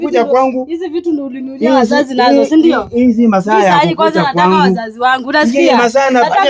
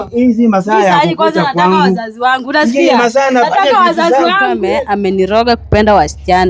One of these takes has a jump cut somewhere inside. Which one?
second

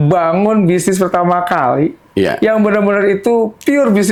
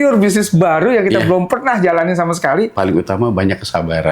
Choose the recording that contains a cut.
second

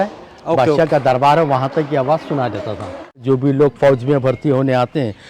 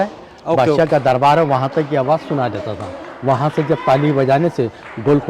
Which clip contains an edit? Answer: first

